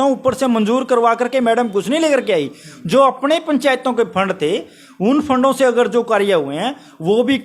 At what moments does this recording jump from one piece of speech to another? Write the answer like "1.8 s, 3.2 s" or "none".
none